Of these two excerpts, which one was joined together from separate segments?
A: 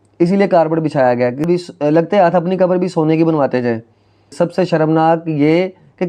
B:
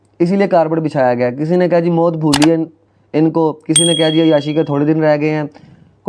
A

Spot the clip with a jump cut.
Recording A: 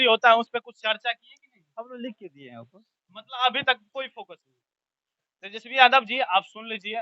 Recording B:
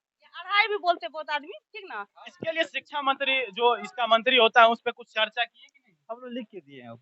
B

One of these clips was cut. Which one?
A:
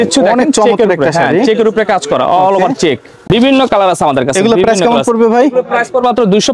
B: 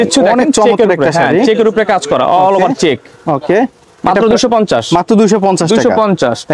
A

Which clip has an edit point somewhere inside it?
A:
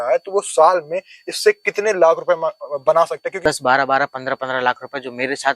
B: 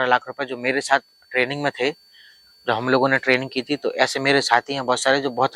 A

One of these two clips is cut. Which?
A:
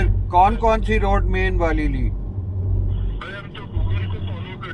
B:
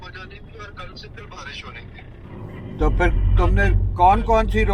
B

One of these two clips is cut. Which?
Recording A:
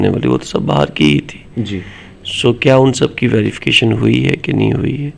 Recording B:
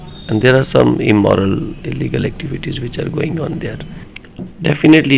B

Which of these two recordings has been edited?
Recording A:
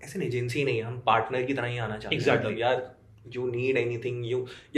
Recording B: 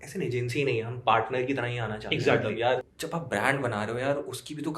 B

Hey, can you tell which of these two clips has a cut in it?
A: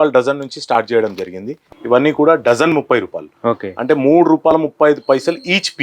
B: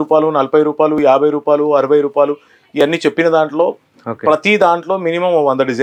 A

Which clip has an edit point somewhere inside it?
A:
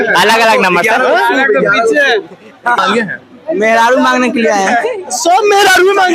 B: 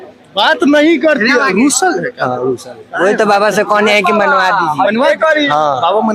A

